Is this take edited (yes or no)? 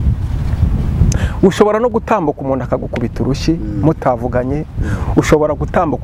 no